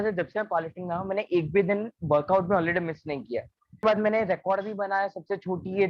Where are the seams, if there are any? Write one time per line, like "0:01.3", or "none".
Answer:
0:03.8